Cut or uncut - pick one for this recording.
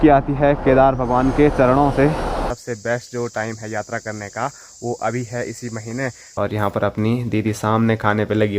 cut